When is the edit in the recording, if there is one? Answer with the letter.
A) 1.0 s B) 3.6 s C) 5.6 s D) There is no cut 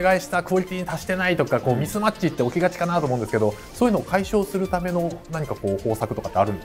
D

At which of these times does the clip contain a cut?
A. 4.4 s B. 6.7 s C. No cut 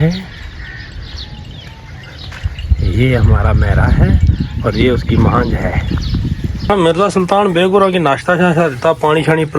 B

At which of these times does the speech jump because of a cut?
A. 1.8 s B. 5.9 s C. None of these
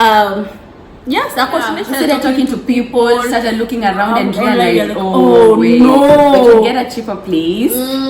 A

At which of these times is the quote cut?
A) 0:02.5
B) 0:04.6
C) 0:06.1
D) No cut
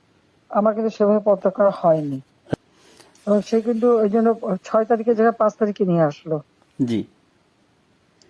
A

